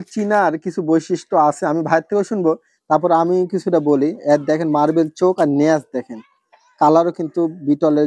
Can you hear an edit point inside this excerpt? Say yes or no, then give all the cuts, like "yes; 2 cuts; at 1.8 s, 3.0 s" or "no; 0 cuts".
no; 0 cuts